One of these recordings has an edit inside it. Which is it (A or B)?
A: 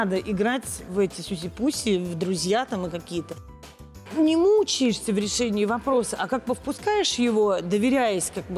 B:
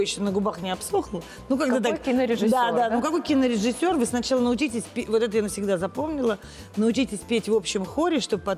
A